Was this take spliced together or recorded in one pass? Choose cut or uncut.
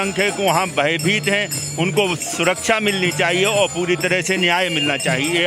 uncut